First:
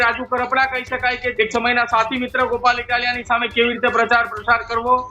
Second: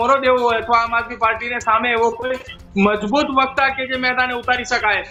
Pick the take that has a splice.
first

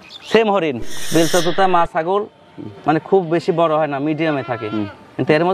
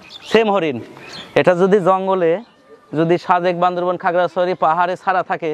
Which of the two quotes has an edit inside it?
first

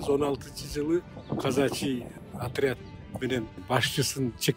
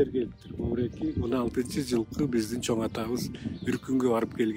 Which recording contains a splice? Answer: first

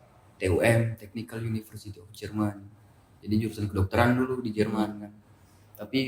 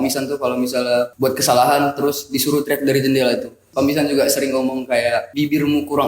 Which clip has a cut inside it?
second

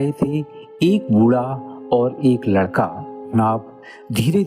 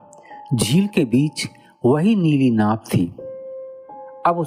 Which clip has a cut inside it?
first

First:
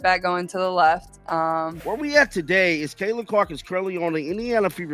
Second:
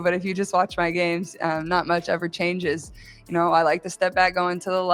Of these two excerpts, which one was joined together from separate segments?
first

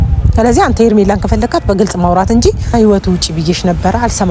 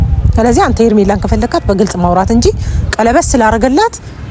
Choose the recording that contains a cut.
first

